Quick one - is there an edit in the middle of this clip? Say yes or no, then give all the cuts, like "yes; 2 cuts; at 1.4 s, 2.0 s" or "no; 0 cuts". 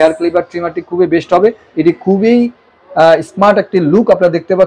yes; 1 cut; at 1.6 s